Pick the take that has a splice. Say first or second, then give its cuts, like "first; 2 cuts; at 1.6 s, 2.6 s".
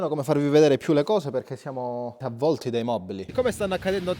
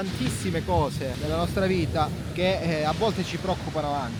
first; 2 cuts; at 2.3 s, 3.2 s